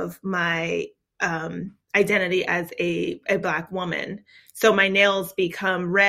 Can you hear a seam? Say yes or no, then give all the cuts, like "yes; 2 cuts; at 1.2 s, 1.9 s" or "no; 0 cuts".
no; 0 cuts